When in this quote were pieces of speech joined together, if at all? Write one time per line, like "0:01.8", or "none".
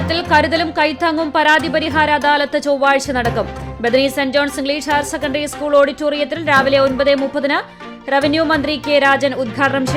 none